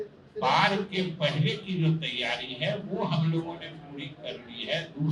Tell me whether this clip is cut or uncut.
uncut